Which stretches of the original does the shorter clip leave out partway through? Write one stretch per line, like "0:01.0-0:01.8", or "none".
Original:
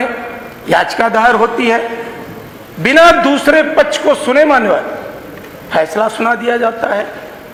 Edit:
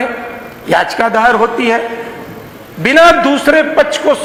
none